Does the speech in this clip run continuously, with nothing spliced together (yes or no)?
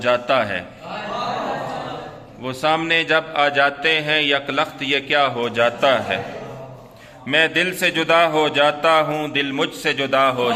yes